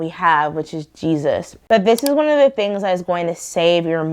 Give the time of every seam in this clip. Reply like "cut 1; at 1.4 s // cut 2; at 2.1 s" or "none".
cut 1; at 1.5 s